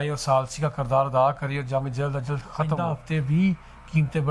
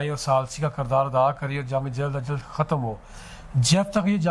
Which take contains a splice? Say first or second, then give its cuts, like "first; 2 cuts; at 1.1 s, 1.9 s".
first; 1 cut; at 2.7 s